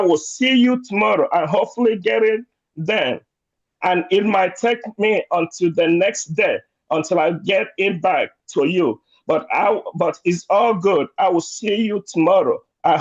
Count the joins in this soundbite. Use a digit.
0